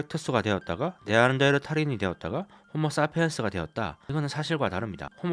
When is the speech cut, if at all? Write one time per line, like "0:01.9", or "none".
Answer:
0:04.0